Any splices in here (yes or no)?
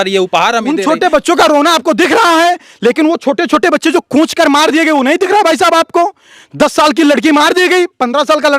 no